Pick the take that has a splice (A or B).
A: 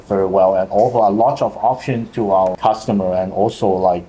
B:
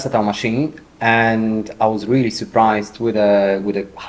A